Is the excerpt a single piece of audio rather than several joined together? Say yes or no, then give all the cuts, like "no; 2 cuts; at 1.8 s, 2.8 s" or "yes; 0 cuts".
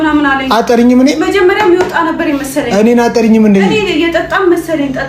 yes; 0 cuts